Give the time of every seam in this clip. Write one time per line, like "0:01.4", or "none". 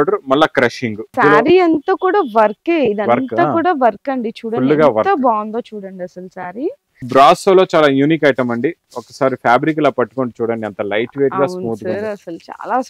0:01.1
0:07.0